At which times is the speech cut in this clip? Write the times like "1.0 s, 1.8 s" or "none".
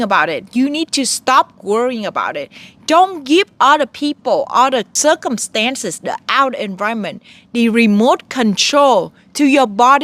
4.9 s

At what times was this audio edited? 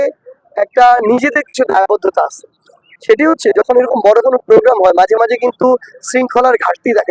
none

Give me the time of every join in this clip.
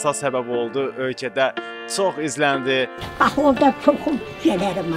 3.0 s

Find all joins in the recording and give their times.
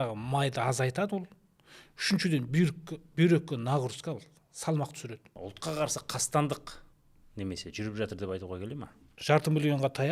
5.3 s, 9.1 s

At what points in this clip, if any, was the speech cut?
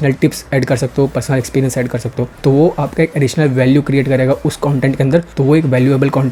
none

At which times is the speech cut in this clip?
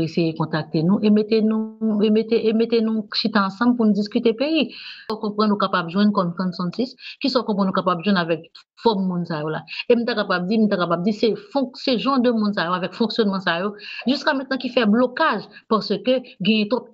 5.1 s

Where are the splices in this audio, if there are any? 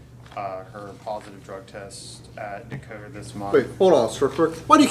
3.1 s

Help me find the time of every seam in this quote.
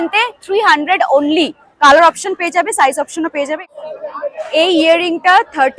3.6 s

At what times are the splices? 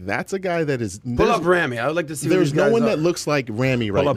none

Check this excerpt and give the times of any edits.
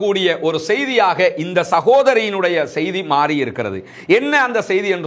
none

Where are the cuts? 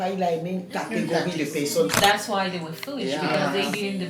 2.0 s

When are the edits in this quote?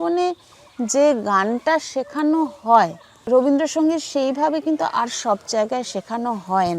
3.1 s

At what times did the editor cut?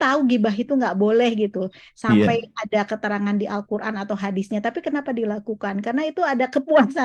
none

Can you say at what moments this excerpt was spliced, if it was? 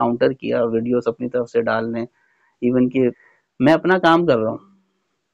3.2 s

